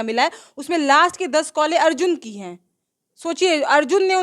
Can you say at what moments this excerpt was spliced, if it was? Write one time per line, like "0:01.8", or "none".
none